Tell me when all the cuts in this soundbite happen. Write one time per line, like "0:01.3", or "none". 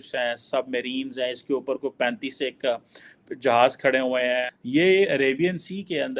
0:04.6